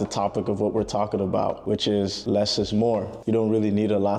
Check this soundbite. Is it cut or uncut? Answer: uncut